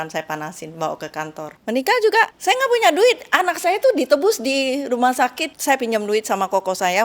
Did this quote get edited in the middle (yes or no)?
yes